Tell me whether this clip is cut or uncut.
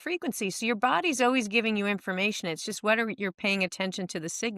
uncut